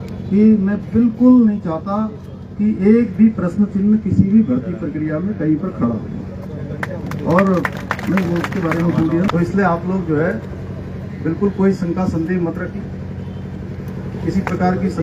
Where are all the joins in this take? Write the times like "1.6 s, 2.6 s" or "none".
9.3 s